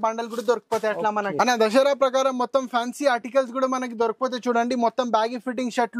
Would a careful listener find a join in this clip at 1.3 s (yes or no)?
yes